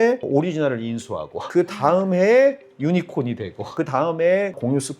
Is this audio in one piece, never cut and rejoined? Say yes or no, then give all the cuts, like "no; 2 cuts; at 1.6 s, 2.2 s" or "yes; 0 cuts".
no; 1 cut; at 1.5 s